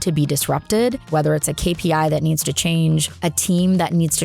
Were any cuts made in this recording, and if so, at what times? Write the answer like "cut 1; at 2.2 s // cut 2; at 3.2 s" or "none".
cut 1; at 1.1 s // cut 2; at 3.1 s